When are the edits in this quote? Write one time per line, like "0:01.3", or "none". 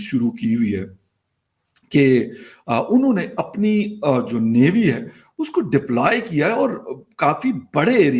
none

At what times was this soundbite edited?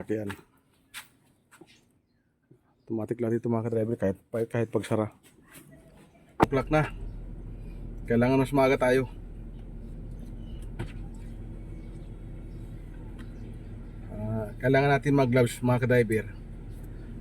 0:06.4

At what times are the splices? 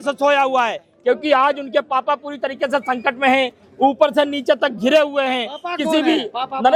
none

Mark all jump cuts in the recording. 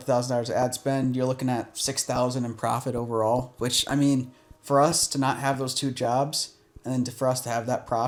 none

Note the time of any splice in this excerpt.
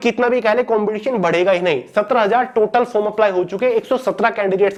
none

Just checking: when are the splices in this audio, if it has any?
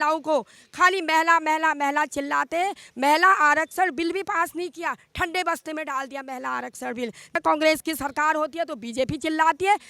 0:07.3

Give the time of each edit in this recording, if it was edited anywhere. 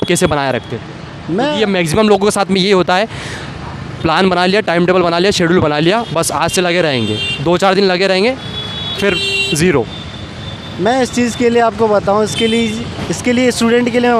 none

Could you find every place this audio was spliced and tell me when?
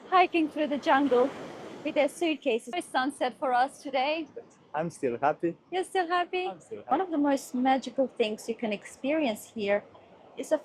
0:02.9
0:06.8

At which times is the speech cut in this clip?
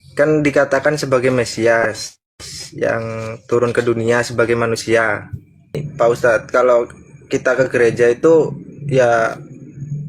0:05.8

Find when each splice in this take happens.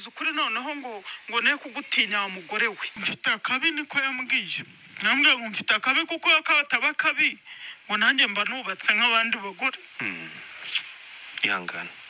0:03.0

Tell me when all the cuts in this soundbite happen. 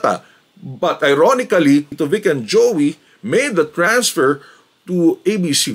0:01.9

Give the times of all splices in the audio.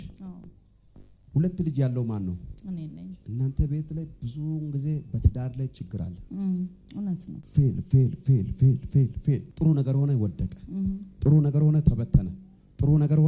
0:03.2
0:07.4
0:09.5

